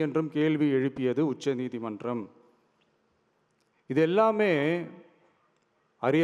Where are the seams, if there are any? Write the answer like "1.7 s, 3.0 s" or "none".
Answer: none